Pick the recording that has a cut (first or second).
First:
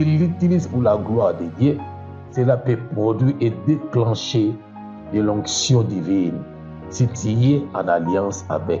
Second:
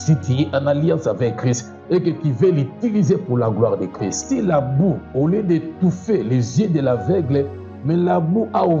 second